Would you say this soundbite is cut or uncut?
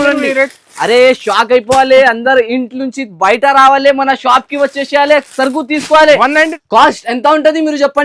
cut